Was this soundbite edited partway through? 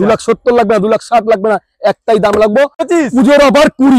yes; 1 cut; at 2.8 s

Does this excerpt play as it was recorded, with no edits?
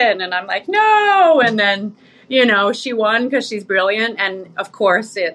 yes; 0 cuts

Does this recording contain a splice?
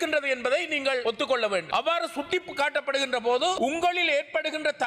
no; 0 cuts

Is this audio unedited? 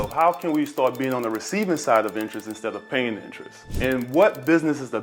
yes; 0 cuts

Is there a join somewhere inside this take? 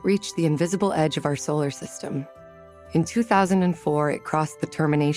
no; 0 cuts

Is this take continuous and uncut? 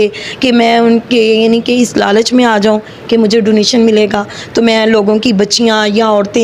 yes; 0 cuts

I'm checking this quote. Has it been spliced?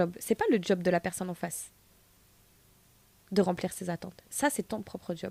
no; 0 cuts

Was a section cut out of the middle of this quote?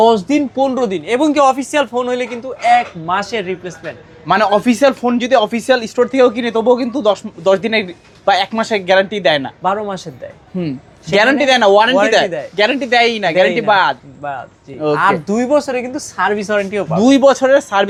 no; 0 cuts

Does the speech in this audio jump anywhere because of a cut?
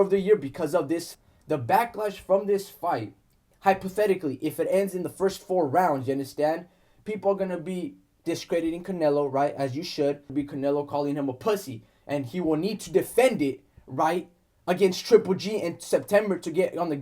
yes; 2 cuts; at 1.1 s, 10.3 s

